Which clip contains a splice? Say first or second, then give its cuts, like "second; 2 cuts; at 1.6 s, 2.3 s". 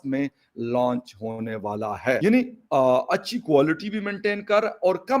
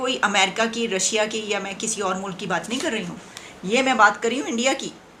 first; 1 cut; at 2.2 s